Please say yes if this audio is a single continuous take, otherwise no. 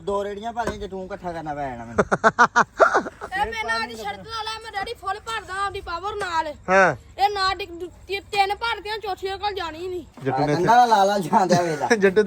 no